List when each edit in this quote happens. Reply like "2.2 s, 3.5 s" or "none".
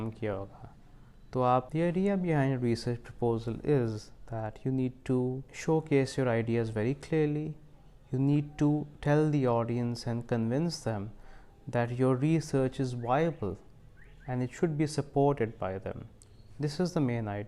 1.7 s, 5.5 s